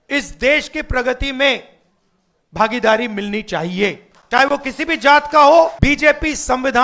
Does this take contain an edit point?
yes; 1 cut; at 5.8 s

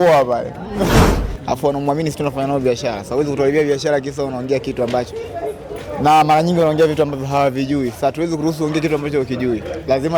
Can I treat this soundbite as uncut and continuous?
no; 1 cut; at 1.1 s

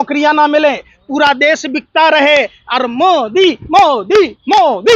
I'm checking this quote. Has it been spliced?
no; 0 cuts

